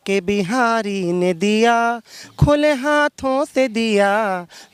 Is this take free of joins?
yes; 0 cuts

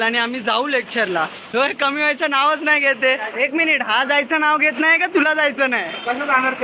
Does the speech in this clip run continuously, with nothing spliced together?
yes; 0 cuts

